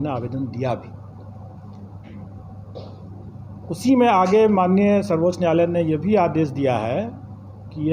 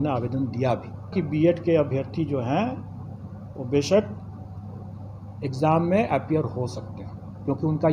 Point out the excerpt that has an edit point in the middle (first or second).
second